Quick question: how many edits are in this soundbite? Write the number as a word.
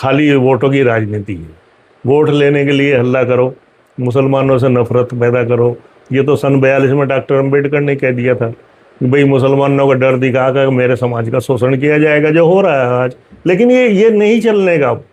zero